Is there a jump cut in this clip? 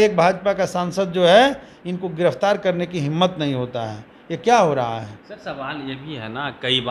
no; 0 cuts

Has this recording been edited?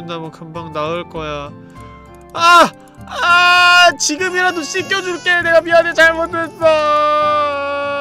no; 0 cuts

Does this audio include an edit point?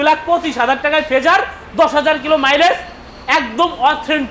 no; 0 cuts

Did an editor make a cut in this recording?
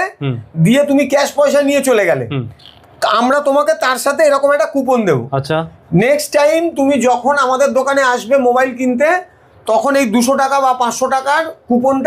no; 0 cuts

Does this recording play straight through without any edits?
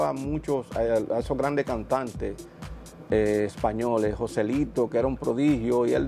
yes; 0 cuts

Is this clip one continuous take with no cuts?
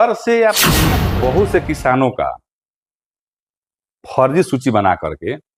no; 1 cut; at 1.0 s

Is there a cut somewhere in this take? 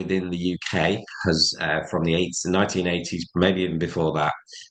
no; 0 cuts

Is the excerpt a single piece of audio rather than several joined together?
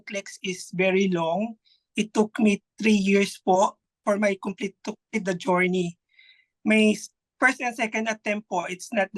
yes; 0 cuts

